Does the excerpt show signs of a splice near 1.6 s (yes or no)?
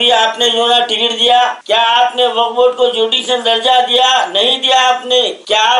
yes